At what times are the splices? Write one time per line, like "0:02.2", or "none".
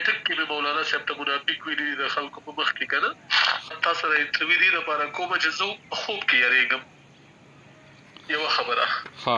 0:03.7